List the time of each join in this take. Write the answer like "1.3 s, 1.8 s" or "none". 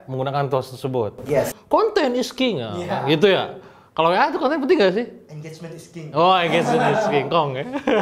1.5 s